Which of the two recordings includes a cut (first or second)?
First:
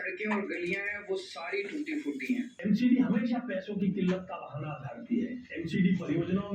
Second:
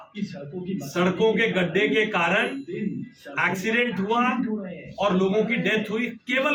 first